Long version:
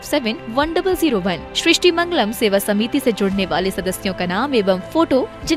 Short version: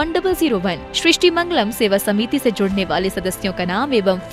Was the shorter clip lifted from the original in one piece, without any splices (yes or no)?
yes